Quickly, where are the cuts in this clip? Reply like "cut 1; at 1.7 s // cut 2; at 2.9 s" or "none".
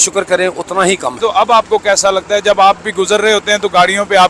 cut 1; at 1.2 s